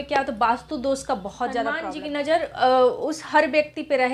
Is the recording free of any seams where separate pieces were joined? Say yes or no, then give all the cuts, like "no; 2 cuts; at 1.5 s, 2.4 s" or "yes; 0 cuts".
no; 1 cut; at 1.9 s